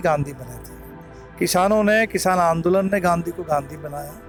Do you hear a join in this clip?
no; 0 cuts

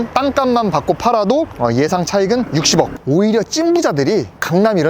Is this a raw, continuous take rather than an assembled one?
no; 1 cut; at 3.0 s

